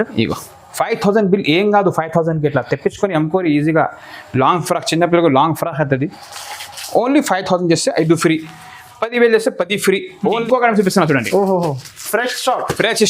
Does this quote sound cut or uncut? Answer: cut